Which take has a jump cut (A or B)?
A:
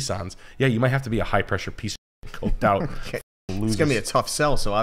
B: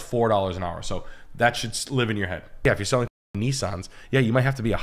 B